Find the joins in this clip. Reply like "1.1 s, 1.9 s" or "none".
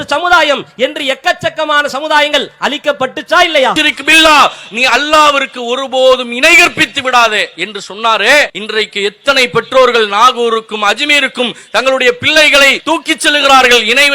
3.8 s, 8.6 s, 12.8 s